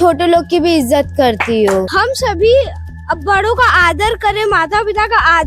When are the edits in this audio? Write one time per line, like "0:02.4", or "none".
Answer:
0:01.8